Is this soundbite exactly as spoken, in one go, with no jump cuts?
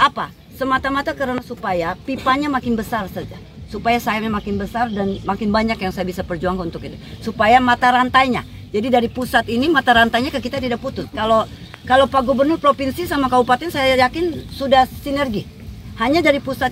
yes; 0 cuts

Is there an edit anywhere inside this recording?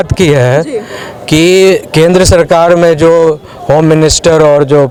no; 0 cuts

